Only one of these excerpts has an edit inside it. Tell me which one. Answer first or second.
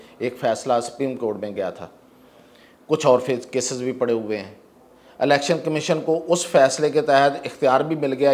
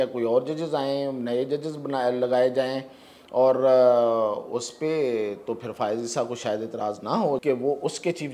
second